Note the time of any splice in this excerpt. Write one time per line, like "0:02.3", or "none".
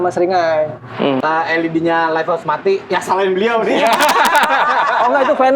0:01.2